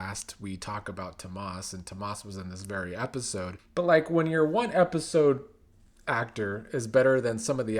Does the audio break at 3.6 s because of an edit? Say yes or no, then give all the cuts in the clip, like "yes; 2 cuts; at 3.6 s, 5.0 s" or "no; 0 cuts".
yes; 1 cut; at 3.6 s